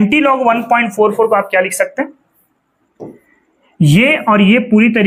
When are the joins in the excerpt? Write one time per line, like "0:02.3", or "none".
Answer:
0:02.8